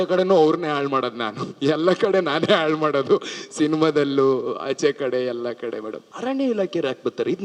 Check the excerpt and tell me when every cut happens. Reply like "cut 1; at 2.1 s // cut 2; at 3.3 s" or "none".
cut 1; at 6.0 s